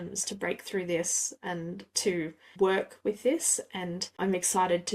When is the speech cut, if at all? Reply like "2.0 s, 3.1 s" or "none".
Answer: 4.0 s